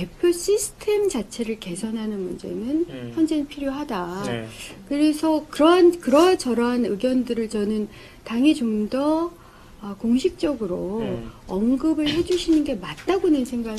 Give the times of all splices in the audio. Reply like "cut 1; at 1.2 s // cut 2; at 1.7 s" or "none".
none